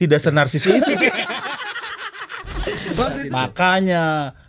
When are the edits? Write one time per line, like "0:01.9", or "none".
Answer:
0:03.1